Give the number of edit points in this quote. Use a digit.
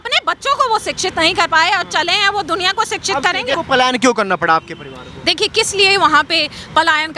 1